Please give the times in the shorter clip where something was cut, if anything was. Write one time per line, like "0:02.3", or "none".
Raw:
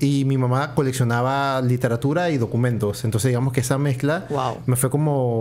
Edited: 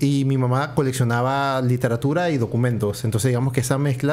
none